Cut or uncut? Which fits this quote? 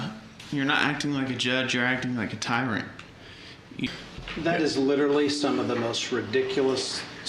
cut